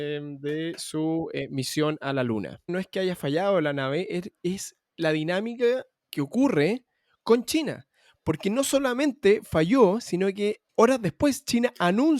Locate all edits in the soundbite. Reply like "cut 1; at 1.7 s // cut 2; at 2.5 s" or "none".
cut 1; at 2.6 s // cut 2; at 6.0 s // cut 3; at 10.6 s